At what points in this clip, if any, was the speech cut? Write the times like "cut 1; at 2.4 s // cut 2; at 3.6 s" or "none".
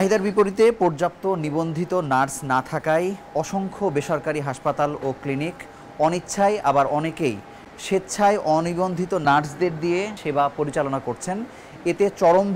none